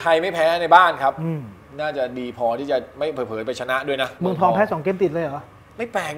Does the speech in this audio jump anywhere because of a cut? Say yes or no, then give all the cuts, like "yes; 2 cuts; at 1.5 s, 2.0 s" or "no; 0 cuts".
yes; 1 cut; at 4.1 s